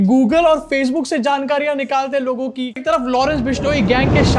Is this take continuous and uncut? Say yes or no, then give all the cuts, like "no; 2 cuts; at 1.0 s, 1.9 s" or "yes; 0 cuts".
no; 1 cut; at 2.8 s